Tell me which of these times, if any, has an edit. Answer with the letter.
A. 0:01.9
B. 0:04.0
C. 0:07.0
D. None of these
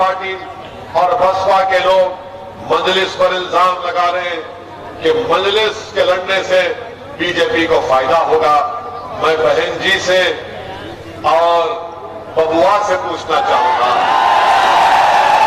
D